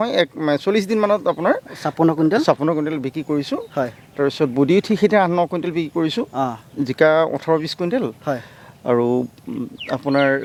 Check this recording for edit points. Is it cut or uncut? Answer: uncut